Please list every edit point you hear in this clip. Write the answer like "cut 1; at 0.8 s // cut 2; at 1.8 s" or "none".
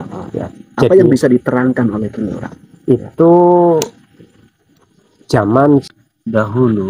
cut 1; at 5.9 s